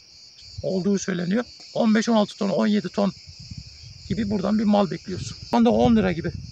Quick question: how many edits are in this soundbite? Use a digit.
2